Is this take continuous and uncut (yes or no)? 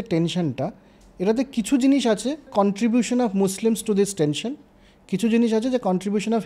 no